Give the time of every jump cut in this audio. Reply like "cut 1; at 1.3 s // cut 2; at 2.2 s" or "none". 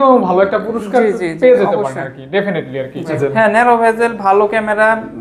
cut 1; at 3.2 s